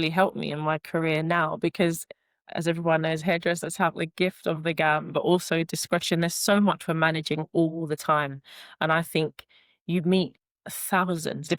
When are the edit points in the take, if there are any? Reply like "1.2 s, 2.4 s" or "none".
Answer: none